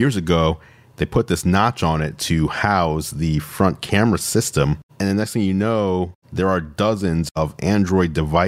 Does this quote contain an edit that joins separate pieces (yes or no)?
yes